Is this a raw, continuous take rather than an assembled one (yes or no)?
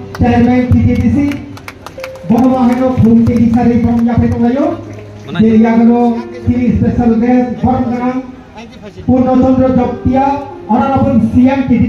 yes